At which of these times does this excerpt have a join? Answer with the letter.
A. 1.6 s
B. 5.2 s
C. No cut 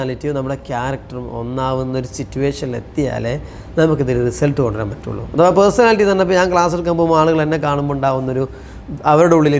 C